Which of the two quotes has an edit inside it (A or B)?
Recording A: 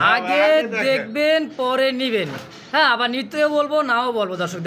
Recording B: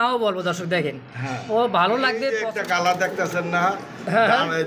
B